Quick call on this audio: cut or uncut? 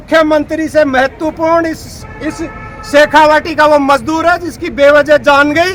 uncut